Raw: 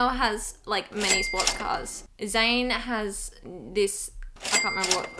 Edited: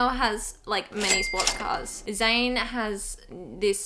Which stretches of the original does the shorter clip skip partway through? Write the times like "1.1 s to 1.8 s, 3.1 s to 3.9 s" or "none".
1.9 s to 2.1 s